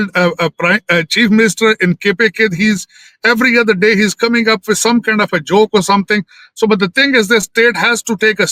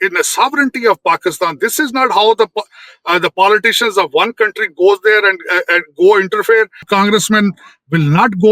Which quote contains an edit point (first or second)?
second